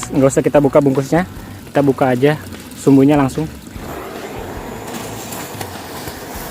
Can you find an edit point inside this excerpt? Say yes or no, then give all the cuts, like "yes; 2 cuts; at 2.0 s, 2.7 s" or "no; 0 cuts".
yes; 1 cut; at 4.2 s